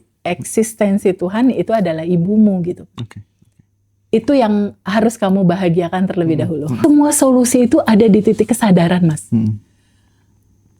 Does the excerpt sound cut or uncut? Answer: cut